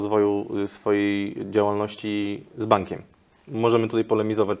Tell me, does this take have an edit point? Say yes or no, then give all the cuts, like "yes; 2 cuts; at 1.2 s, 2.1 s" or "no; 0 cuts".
no; 0 cuts